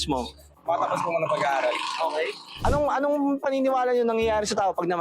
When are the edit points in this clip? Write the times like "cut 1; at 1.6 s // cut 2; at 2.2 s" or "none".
cut 1; at 2.4 s